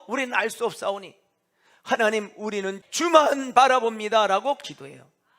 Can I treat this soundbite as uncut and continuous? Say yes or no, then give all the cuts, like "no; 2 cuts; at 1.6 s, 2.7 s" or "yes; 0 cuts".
no; 1 cut; at 2.8 s